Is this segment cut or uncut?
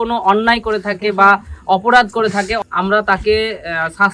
cut